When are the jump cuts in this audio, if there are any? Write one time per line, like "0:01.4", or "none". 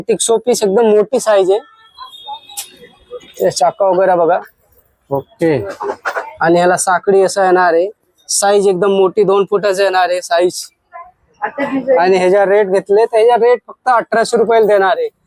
none